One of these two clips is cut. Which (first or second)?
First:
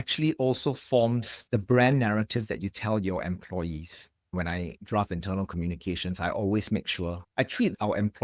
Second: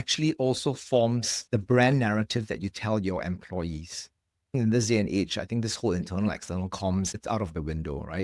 first